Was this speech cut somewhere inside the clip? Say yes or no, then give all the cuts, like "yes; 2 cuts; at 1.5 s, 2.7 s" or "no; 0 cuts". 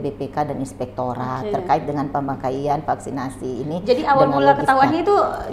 no; 0 cuts